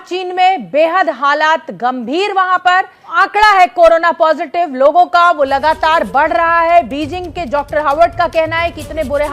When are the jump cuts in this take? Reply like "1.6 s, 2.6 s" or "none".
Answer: 3.1 s